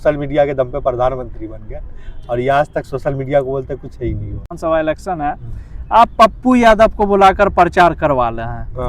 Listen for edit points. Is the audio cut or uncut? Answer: cut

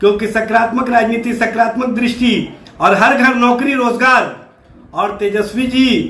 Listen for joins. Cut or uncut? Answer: uncut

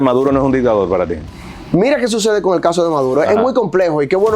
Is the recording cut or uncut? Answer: uncut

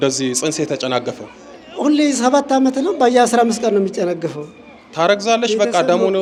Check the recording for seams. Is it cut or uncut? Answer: uncut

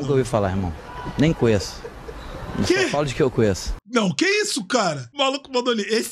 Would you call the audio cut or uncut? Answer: cut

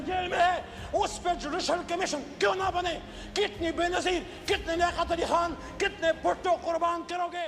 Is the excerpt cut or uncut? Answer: uncut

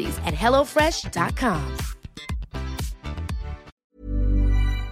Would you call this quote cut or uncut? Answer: cut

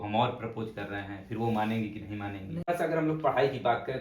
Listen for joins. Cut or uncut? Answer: cut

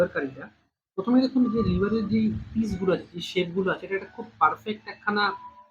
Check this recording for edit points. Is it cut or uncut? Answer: uncut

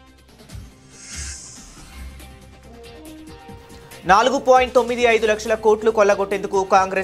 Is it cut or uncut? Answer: uncut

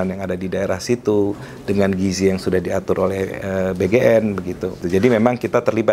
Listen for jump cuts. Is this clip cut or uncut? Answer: cut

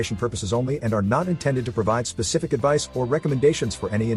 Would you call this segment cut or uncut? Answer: uncut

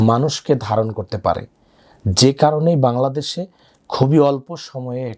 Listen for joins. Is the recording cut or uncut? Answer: uncut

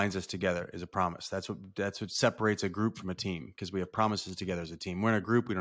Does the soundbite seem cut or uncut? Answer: uncut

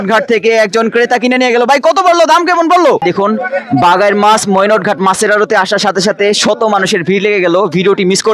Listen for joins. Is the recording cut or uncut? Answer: cut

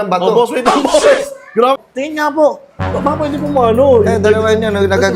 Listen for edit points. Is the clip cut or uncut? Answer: cut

